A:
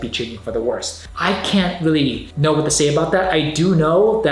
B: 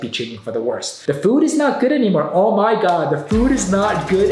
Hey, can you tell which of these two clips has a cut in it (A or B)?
B